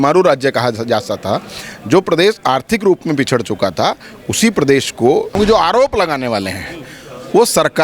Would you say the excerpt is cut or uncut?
cut